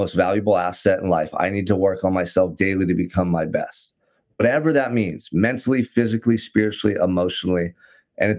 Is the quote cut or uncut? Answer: uncut